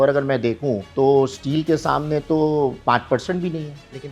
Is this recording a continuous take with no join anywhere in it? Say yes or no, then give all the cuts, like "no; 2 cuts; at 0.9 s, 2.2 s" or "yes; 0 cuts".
no; 2 cuts; at 0.9 s, 2.8 s